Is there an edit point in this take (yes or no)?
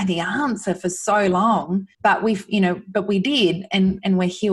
yes